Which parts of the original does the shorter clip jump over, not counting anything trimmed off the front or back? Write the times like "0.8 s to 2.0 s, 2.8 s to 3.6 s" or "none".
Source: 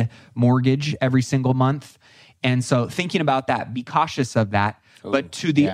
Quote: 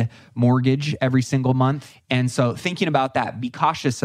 1.9 s to 2.3 s